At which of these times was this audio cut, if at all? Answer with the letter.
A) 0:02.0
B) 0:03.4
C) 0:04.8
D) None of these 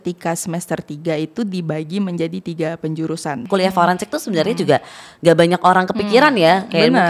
B